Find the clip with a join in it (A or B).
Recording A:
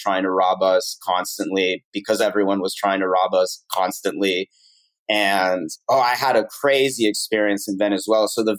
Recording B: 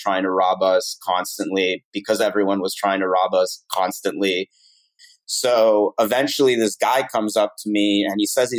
B